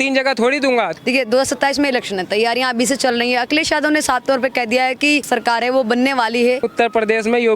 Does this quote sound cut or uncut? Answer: cut